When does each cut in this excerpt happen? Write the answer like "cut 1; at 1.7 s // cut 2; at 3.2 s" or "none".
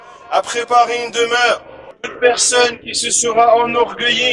cut 1; at 2.0 s